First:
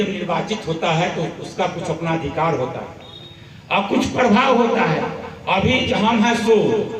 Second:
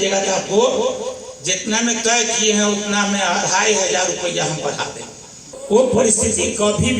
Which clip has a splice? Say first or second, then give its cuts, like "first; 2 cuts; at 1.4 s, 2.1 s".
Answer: second; 1 cut; at 5.5 s